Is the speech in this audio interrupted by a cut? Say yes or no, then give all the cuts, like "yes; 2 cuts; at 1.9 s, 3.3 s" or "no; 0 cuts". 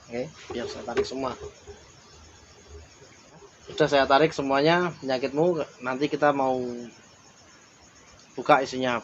yes; 1 cut; at 3.4 s